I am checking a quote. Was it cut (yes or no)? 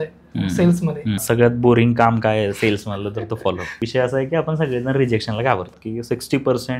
yes